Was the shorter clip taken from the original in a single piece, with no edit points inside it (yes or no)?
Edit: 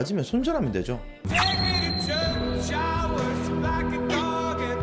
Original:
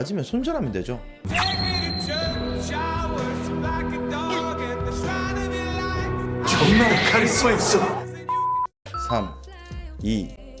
yes